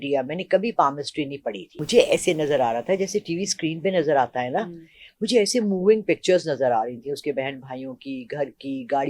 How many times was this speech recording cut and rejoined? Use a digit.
1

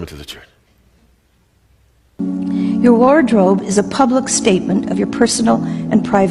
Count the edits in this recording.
1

